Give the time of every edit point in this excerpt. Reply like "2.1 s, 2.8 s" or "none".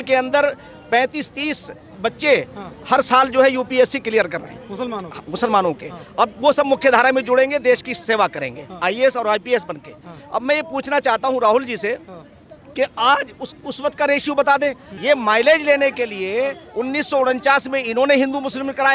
1.9 s, 14.8 s